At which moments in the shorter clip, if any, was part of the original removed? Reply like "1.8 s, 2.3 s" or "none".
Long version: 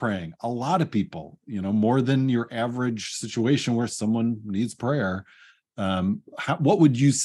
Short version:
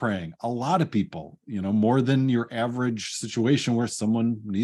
none